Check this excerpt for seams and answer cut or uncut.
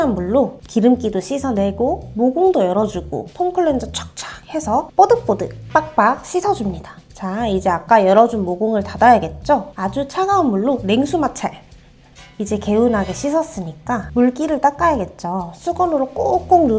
uncut